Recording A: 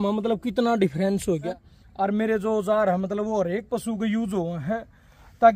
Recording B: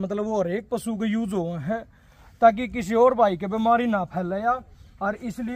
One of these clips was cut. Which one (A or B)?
A